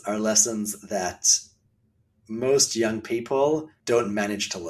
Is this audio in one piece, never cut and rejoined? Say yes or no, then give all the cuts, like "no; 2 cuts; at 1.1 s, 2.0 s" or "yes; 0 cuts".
no; 1 cut; at 3.7 s